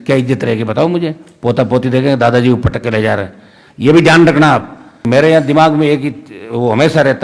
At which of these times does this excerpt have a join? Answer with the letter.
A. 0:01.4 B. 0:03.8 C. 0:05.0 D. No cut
C